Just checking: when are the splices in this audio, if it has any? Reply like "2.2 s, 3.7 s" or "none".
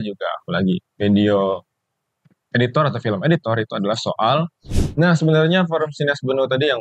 4.8 s